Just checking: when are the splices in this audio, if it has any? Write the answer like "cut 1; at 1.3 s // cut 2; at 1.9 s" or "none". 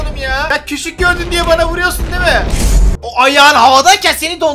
none